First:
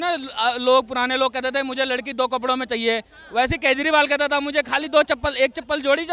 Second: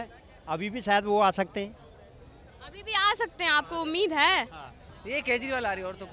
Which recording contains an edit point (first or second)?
second